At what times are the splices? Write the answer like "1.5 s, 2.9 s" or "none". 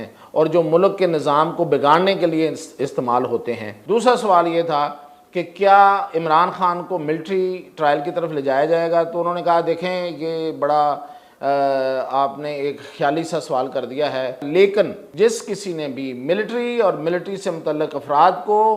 3.7 s, 14.4 s, 15.0 s